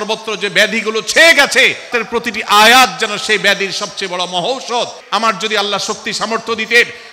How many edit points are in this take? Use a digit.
2